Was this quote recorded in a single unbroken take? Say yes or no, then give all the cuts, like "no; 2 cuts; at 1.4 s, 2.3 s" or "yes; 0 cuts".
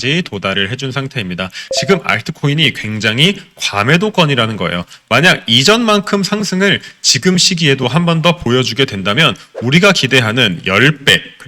no; 1 cut; at 1.7 s